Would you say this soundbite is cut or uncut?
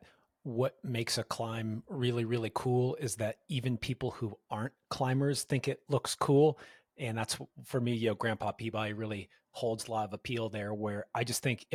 uncut